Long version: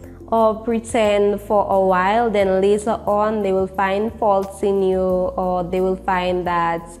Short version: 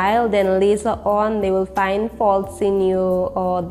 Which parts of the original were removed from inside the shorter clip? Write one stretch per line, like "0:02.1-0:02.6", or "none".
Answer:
none